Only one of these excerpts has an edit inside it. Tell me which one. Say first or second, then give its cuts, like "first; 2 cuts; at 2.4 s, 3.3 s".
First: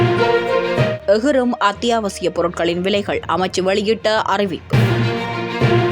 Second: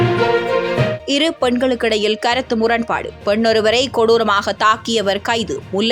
first; 1 cut; at 1.0 s